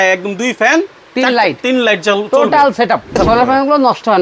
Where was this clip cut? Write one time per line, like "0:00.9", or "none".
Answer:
0:03.2